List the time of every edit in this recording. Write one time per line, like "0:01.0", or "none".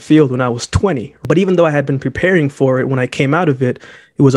0:01.1